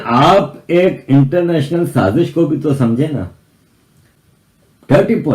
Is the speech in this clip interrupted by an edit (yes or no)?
no